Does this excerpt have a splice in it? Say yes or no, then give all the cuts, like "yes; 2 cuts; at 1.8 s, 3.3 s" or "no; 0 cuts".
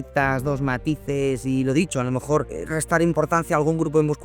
yes; 1 cut; at 2.6 s